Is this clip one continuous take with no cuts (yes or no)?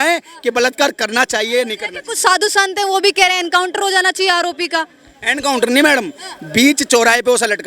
yes